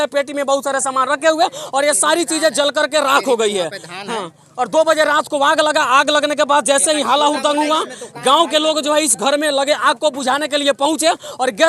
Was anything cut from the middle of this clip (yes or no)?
no